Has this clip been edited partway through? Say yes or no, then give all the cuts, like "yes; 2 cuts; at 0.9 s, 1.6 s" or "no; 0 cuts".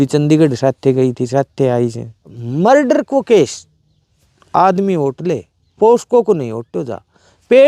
yes; 1 cut; at 2.4 s